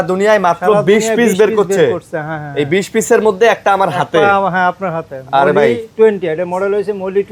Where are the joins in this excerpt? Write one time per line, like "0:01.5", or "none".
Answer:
none